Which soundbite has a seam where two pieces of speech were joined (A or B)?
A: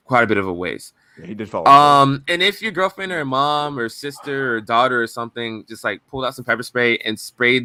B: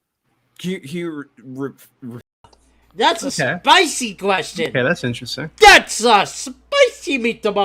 B